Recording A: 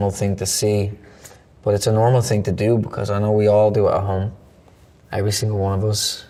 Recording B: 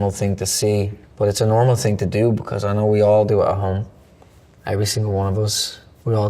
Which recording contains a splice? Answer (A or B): B